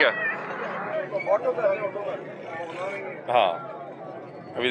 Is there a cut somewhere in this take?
no; 0 cuts

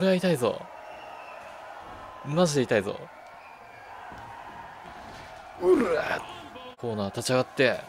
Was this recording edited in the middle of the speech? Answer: yes; 1 cut; at 6.7 s

